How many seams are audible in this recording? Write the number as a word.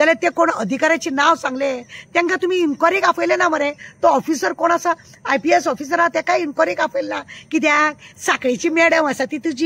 zero